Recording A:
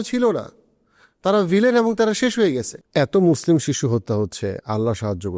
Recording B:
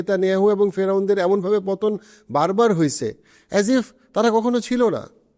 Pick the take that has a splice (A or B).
A